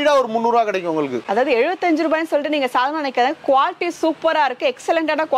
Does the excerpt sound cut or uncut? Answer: uncut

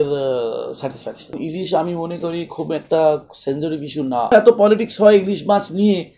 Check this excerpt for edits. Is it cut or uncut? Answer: cut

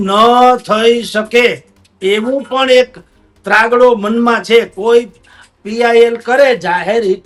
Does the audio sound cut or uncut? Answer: uncut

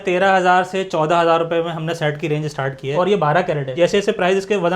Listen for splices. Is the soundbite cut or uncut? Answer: cut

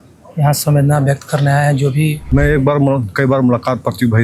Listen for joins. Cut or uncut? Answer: cut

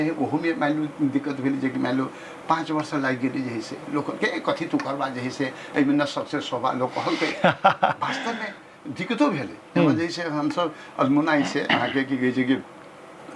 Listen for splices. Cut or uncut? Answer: uncut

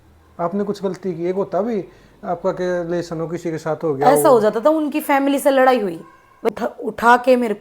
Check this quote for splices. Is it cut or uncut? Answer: cut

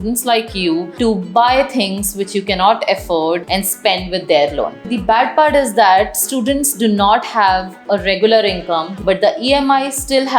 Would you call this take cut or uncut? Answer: cut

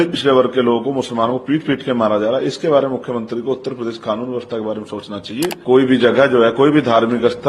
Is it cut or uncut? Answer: cut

